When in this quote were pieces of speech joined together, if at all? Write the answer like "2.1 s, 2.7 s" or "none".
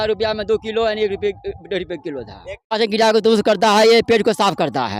2.7 s